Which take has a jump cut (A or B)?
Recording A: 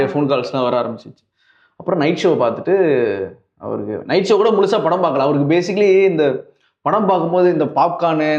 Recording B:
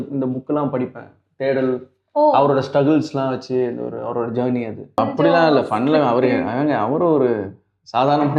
B